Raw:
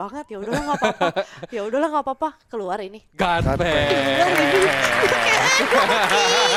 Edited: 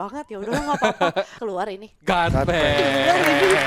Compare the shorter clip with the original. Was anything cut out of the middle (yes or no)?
yes